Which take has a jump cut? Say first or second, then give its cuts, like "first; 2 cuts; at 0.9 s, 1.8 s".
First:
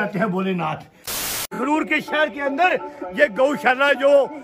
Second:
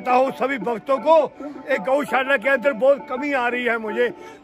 first; 1 cut; at 1.4 s